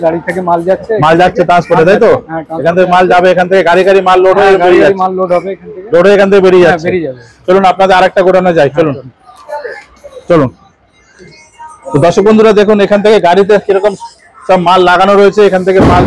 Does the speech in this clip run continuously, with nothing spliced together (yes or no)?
yes